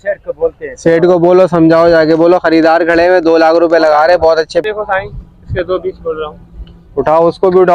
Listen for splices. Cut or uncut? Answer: cut